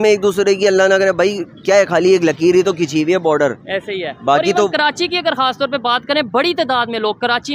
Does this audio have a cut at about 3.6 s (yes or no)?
no